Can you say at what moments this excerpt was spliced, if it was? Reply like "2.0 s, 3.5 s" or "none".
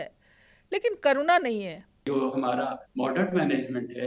2.0 s